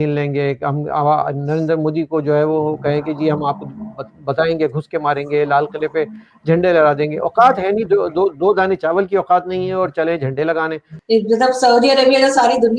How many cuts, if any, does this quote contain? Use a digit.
1